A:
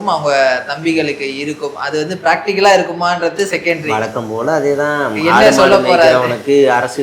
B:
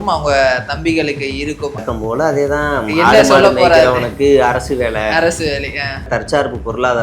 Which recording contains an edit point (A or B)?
B